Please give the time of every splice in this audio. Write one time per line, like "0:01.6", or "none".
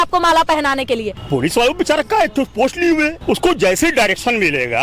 0:01.1
0:03.2

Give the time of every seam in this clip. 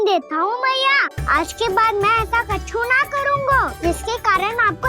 0:01.1
0:03.7

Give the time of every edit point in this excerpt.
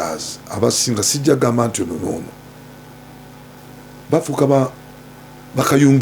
none

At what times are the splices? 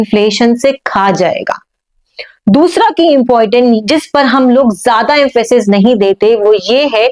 none

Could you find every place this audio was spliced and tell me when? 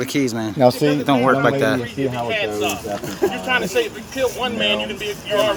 none

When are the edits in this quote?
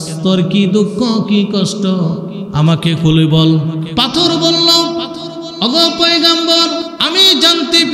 0:03.9
0:05.4
0:06.9

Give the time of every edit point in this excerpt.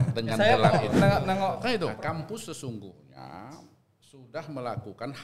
0:01.9

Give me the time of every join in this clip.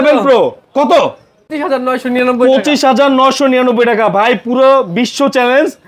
0:01.5

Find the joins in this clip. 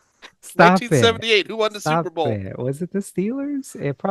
none

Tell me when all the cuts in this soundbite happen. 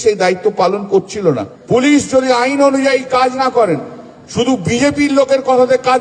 0:01.5

